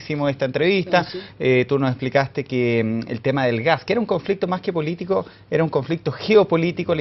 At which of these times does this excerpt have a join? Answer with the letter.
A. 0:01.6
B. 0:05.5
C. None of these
A